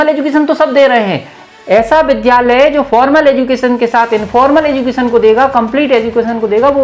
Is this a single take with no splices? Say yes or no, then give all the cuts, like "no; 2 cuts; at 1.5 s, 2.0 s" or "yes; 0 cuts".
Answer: yes; 0 cuts